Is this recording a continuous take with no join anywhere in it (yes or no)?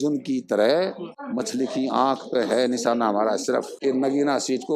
no